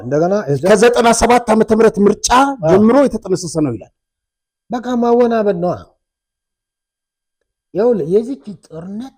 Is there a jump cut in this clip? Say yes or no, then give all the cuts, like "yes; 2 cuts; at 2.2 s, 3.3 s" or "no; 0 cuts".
no; 0 cuts